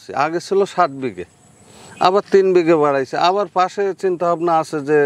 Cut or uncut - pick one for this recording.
uncut